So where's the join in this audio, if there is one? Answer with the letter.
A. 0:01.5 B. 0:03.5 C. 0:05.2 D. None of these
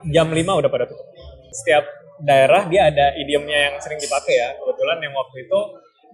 A